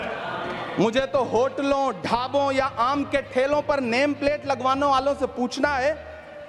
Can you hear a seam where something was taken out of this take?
no; 0 cuts

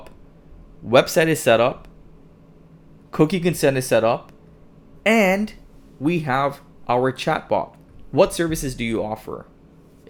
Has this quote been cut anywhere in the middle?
no; 0 cuts

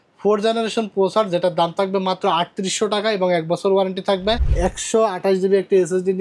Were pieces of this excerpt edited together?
yes; 1 cut; at 4.5 s

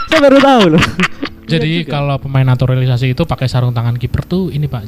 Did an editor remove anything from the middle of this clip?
yes; 1 cut; at 1.4 s

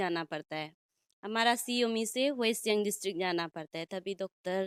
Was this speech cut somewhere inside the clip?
no; 0 cuts

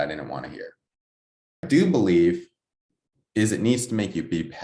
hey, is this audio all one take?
no; 1 cut; at 1.6 s

